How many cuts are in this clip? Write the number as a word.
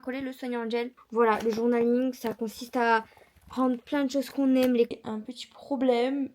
two